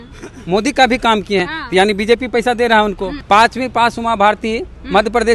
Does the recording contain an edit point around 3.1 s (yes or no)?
yes